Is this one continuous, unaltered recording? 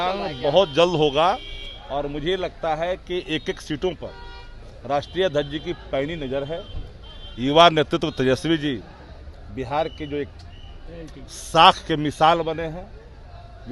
yes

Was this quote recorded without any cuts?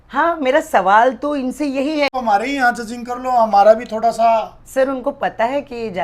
no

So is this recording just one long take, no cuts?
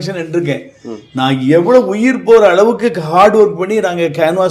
yes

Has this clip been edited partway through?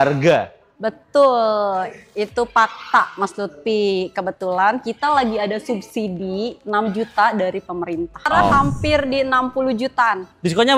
yes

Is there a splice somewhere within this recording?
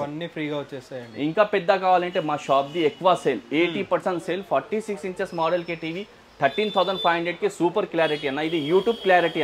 no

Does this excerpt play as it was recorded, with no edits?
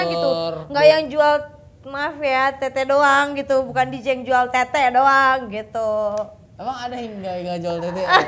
yes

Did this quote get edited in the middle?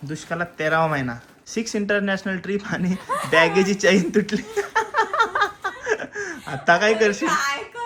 no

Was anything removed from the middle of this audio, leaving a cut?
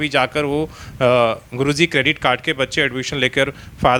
no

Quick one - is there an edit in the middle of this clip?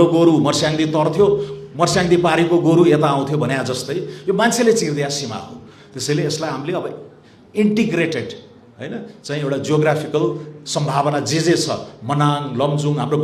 no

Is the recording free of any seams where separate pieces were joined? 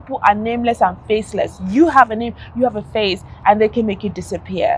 yes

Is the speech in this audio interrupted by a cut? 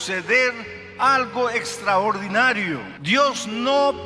no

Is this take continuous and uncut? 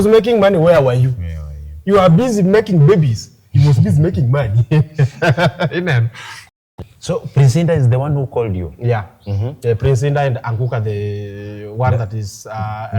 no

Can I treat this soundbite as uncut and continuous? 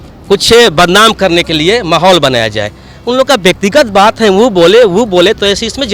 yes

